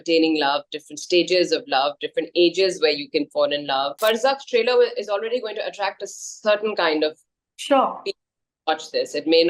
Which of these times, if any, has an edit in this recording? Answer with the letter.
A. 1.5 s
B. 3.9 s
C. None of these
B